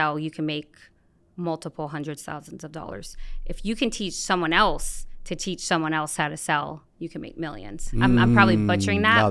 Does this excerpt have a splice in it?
no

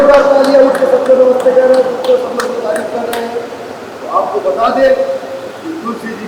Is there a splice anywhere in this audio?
no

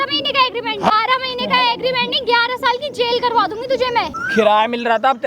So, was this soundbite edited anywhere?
yes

